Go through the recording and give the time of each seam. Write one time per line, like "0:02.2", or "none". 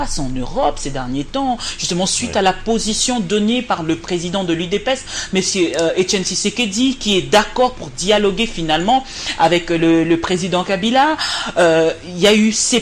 none